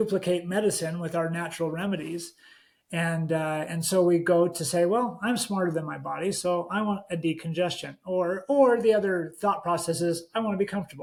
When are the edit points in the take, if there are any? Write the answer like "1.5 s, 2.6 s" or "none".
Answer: none